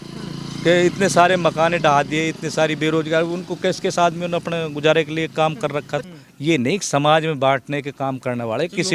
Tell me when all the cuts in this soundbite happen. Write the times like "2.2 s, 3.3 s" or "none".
6.1 s